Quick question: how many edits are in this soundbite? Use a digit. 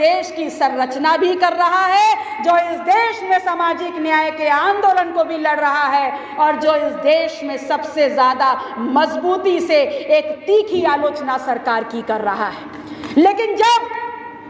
0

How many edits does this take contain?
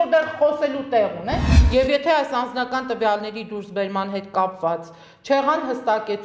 1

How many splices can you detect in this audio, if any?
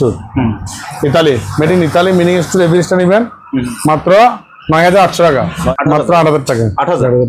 1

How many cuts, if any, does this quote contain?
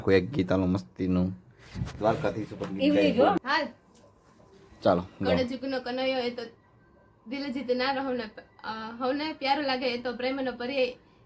1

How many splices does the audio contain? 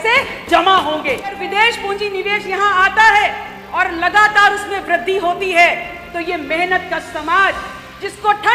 1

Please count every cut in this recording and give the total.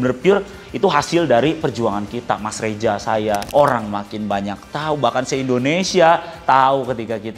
1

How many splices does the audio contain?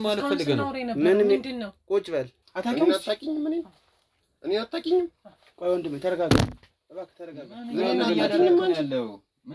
1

